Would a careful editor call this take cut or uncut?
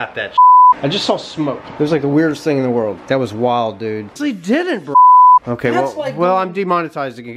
cut